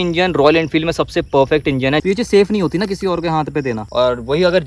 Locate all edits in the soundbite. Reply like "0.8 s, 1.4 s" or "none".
2.0 s, 3.9 s